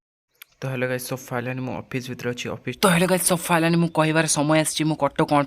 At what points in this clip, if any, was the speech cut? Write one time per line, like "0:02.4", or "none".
0:02.8